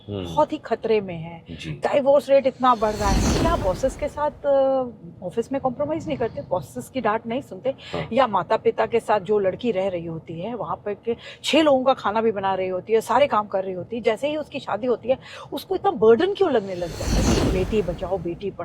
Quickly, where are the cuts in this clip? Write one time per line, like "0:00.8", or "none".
0:03.3
0:17.1